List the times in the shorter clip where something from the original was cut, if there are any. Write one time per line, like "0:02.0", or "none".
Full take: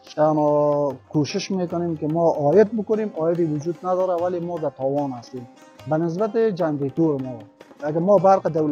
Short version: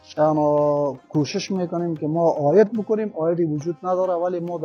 none